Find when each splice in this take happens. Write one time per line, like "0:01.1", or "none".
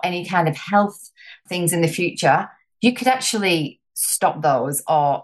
0:01.4